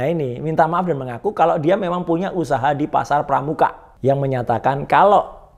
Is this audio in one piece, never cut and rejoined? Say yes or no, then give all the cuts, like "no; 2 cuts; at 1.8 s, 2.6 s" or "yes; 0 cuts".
no; 1 cut; at 3.9 s